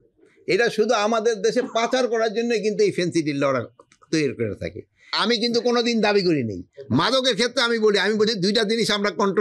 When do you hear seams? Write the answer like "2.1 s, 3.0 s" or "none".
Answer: 5.1 s